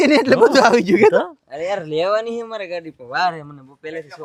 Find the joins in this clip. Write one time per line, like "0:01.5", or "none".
none